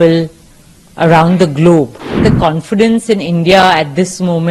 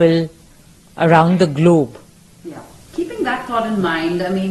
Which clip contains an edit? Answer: first; 1 cut; at 2.2 s

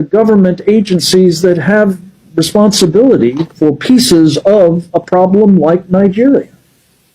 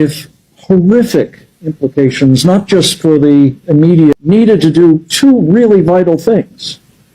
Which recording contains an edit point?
second; 1 cut; at 4.1 s

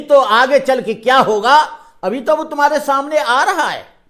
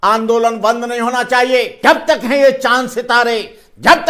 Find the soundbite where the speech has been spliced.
second; 1 cut; at 1.7 s

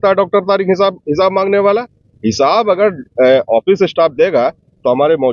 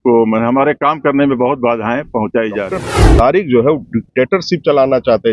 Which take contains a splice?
second; 1 cut; at 3.0 s

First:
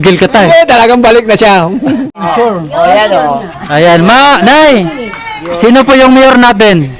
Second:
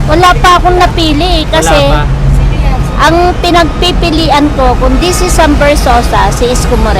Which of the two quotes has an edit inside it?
first; 1 cut; at 2.3 s

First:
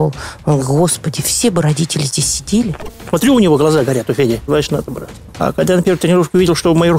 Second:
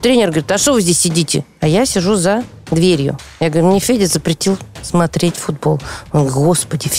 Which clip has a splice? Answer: first; 2 cuts; at 2.9 s, 4.5 s

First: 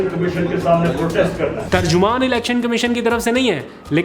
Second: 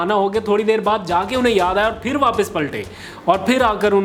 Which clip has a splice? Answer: first; 1 cut; at 1.6 s

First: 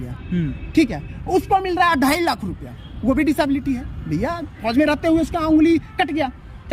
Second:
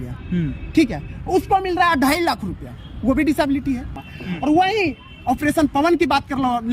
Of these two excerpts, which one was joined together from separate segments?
second; 1 cut; at 4.0 s

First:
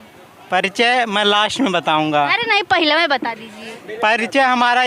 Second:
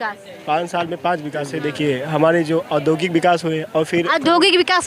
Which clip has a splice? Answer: second; 1 cut; at 1.5 s

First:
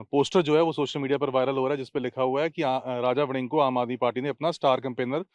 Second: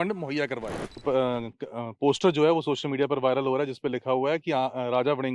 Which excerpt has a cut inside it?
second; 1 cut; at 1.0 s

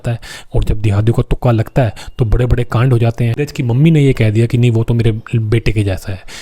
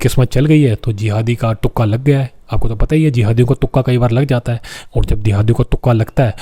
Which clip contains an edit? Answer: first; 1 cut; at 3.3 s

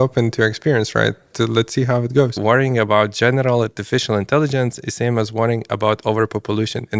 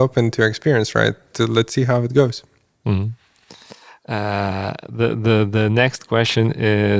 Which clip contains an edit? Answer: first; 1 cut; at 2.4 s

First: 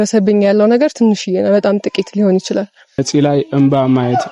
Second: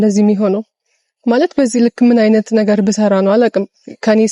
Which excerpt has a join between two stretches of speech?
first; 1 cut; at 3.0 s

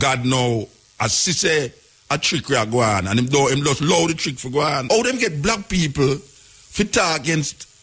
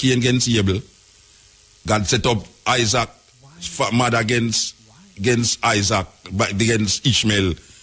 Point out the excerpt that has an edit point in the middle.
first; 1 cut; at 4.8 s

